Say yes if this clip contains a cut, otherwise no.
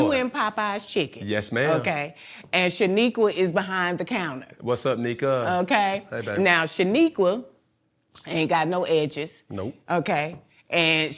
no